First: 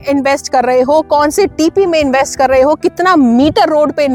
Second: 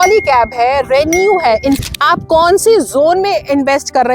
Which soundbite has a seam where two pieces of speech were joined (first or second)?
second